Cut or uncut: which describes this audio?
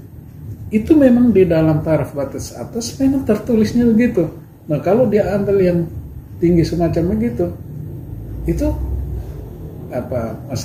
uncut